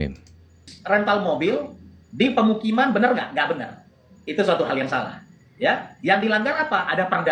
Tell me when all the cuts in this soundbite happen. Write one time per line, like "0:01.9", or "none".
none